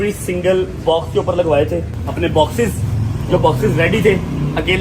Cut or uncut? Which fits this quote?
cut